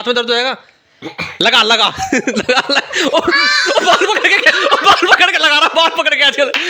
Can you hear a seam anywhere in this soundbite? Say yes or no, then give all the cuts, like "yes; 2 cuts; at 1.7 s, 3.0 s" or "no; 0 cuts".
no; 0 cuts